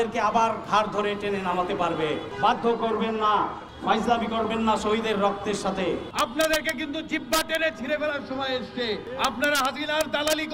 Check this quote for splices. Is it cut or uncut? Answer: cut